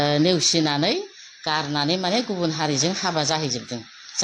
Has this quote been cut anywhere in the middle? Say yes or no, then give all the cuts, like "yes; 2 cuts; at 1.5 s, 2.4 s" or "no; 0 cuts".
no; 0 cuts